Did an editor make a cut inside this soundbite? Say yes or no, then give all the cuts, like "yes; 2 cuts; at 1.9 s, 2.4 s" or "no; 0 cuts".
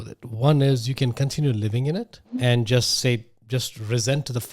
yes; 1 cut; at 2.3 s